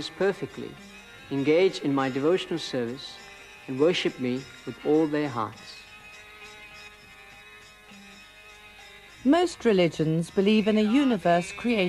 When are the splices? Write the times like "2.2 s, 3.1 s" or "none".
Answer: none